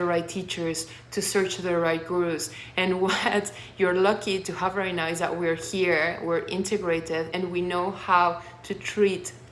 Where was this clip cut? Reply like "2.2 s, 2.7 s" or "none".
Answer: 7.3 s

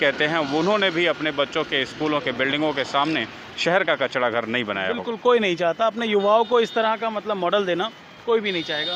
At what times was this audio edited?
none

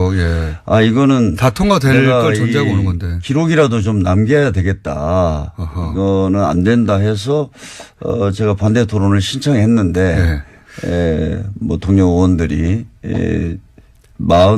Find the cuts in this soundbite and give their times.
13.5 s

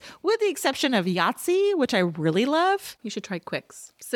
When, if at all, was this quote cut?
3.0 s

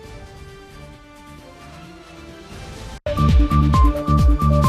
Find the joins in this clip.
3.0 s

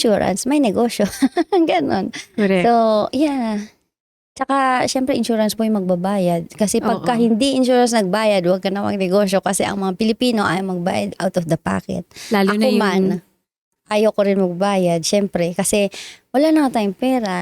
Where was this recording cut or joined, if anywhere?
none

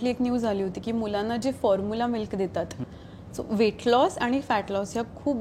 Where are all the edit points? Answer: 2.8 s

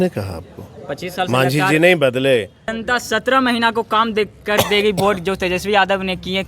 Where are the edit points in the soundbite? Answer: 2.7 s

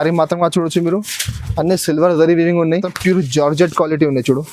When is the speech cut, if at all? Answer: 2.9 s

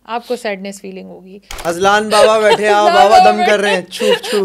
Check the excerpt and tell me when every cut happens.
1.5 s

